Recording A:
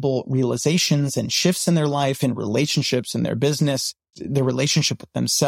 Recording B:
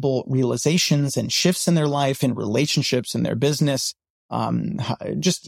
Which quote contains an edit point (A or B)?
A